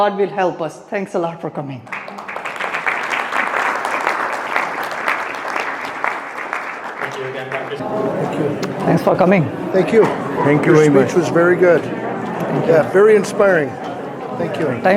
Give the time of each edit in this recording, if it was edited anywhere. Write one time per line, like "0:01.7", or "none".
none